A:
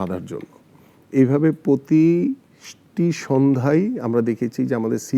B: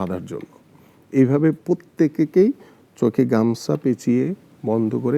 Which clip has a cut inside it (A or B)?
B